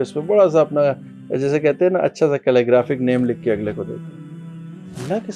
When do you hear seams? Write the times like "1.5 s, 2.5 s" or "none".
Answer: none